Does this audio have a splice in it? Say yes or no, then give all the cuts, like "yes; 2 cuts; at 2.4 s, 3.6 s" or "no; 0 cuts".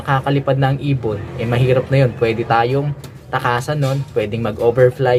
no; 0 cuts